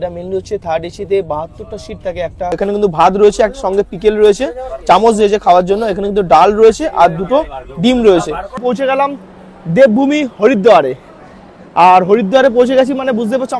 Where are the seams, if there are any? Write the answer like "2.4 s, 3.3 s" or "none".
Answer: 2.5 s, 8.5 s